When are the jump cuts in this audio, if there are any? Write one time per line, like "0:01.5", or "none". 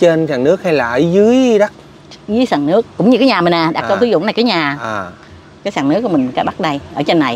none